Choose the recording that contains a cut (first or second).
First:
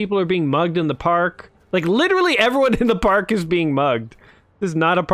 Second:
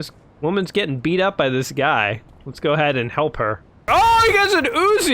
second